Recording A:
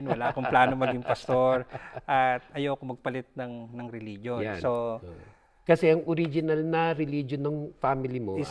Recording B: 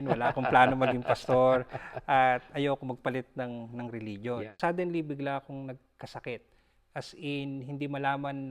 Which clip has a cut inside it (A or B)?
B